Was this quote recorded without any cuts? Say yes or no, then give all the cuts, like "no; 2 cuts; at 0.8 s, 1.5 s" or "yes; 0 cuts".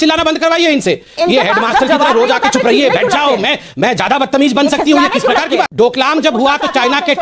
no; 1 cut; at 5.7 s